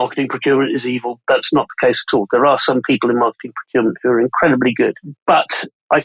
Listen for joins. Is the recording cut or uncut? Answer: cut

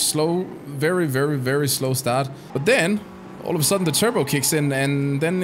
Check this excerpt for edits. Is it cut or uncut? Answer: cut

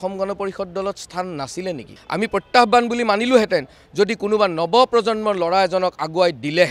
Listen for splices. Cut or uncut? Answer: cut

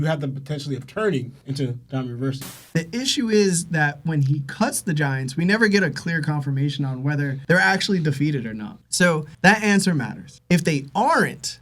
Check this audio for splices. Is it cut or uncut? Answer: cut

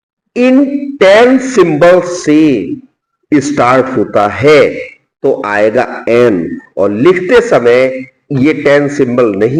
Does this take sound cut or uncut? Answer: uncut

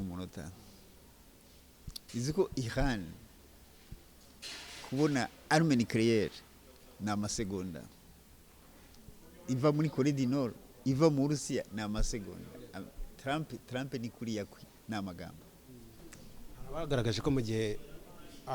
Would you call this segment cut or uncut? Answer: cut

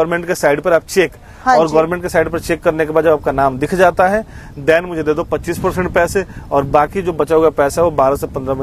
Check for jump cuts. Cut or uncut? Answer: uncut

